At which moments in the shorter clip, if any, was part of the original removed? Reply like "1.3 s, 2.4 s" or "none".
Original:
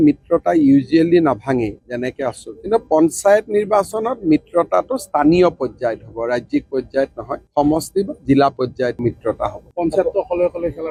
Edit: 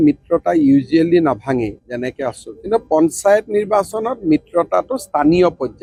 none